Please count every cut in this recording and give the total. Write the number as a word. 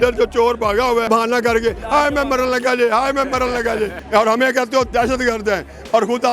two